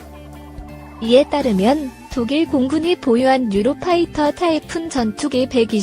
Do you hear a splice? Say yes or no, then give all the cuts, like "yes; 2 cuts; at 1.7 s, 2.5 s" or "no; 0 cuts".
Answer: yes; 1 cut; at 1.0 s